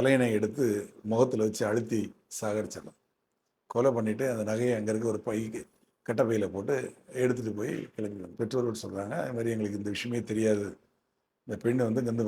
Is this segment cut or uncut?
cut